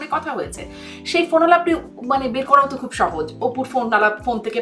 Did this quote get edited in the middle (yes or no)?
no